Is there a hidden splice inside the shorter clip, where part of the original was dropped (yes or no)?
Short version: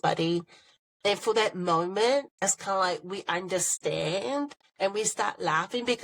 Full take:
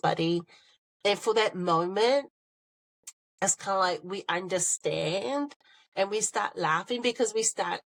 yes